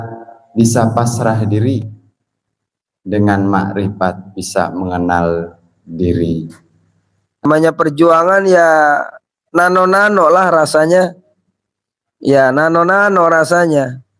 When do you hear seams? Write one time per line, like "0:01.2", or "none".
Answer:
0:07.4